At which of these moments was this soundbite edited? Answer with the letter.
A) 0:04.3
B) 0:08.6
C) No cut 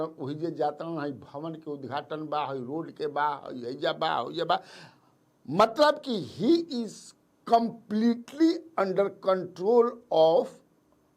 C